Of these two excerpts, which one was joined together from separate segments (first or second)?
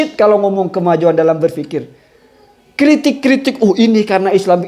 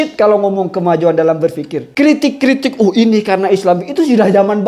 second